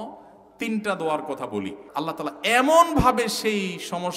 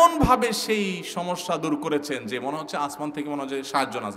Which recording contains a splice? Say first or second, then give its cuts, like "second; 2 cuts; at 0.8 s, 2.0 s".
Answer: first; 1 cut; at 1.8 s